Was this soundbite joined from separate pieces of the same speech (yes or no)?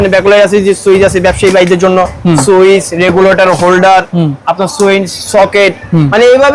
no